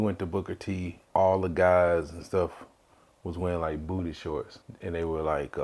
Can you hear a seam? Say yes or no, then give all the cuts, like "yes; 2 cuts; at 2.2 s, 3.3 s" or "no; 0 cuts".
yes; 2 cuts; at 0.9 s, 4.6 s